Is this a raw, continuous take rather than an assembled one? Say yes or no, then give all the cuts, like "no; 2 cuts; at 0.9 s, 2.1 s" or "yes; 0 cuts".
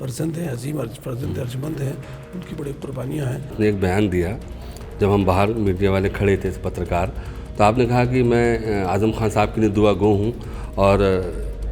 no; 1 cut; at 3.5 s